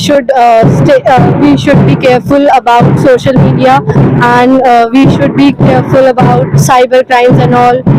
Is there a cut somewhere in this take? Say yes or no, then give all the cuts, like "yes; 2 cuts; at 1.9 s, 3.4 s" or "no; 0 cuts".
no; 0 cuts